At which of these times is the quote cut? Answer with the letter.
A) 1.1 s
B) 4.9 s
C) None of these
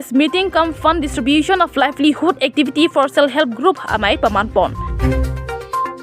B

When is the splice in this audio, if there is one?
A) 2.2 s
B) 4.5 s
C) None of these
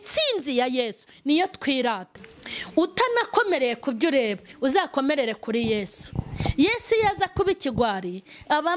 A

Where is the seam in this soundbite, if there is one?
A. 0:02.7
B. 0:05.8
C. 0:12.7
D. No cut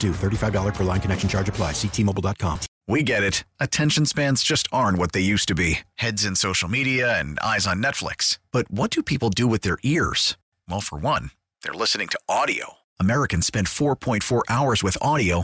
A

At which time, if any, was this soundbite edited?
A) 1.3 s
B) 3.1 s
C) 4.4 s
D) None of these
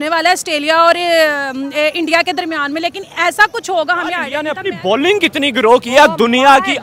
C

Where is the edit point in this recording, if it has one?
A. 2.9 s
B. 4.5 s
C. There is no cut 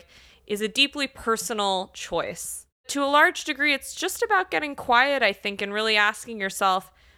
A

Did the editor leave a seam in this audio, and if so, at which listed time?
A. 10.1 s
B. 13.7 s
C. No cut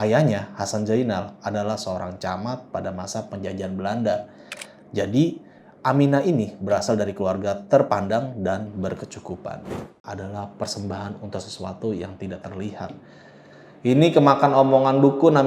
A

